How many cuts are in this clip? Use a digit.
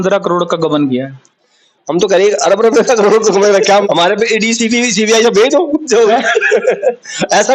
1